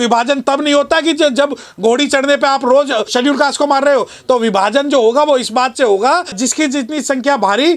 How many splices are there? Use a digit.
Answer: 2